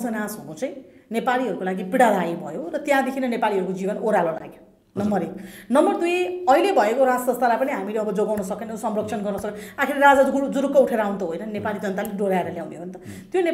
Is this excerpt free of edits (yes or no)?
yes